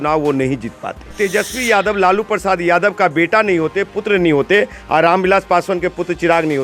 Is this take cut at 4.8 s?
no; 1 cut; at 1.1 s

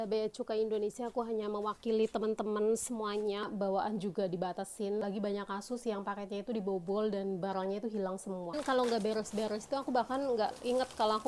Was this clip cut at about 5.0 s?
yes; 3 cuts; at 3.4 s, 5.0 s, 8.6 s

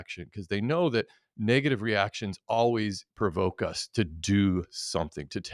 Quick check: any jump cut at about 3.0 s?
yes; 1 cut; at 3.0 s

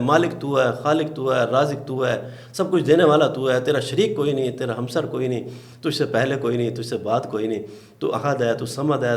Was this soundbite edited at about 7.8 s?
no; 0 cuts

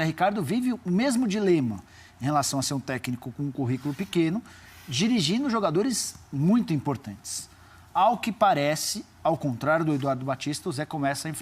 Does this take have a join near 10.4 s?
yes; 1 cut; at 10.4 s

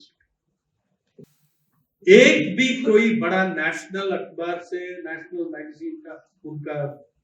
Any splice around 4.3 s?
no; 1 cut; at 1.3 s

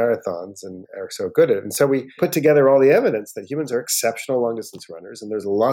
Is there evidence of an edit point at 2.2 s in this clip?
yes; 1 cut; at 2.2 s

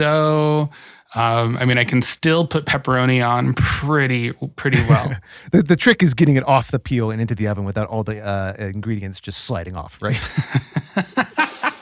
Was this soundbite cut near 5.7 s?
no; 1 cut; at 10.5 s

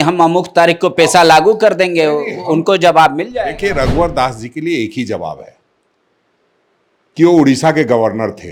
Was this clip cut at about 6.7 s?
no; 0 cuts

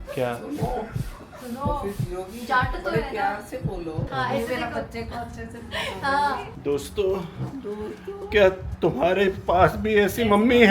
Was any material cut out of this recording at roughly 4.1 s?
yes; 2 cuts; at 4.1 s, 6.5 s

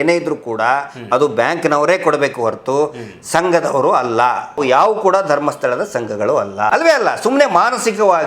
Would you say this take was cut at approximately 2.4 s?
no; 2 cuts; at 4.6 s, 6.7 s

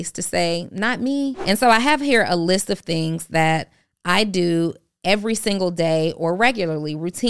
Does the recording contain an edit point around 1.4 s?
yes; 1 cut; at 1.4 s

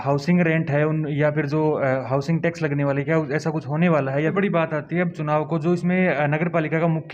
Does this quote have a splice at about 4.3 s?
yes; 1 cut; at 4.3 s

